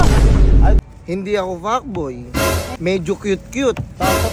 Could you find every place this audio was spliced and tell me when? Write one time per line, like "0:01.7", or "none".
0:00.8
0:02.7